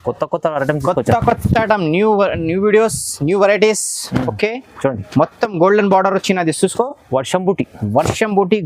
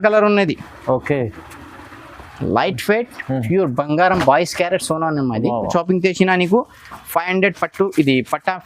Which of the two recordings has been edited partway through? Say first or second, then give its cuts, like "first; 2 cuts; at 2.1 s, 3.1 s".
second; 1 cut; at 5.7 s